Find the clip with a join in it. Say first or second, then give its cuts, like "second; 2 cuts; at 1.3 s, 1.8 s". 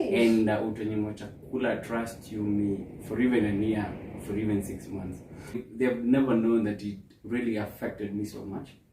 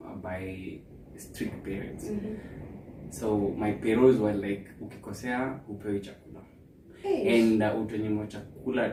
first; 1 cut; at 5.6 s